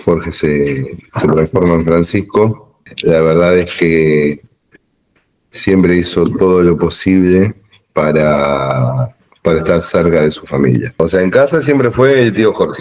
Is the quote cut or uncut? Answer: cut